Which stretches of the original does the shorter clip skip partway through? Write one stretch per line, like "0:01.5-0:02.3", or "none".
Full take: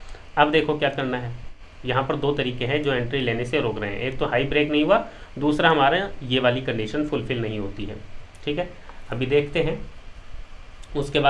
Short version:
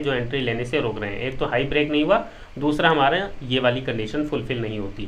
none